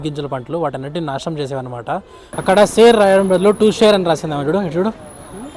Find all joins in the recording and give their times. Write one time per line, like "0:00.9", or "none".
0:02.3